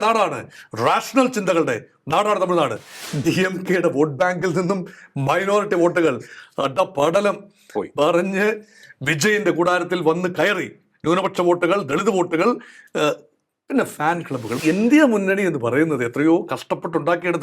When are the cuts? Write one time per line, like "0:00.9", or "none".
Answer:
0:03.0
0:14.6